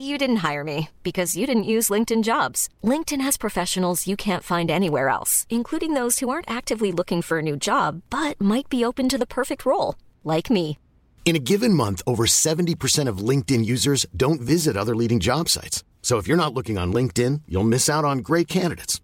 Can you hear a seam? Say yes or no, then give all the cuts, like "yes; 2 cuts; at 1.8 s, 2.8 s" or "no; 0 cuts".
no; 0 cuts